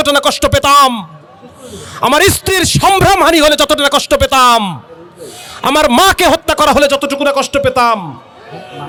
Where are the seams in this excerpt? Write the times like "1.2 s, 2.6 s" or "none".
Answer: none